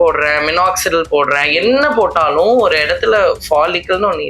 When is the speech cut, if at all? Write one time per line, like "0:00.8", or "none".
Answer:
none